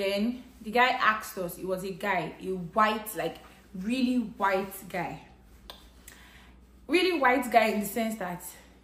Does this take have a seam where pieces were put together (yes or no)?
no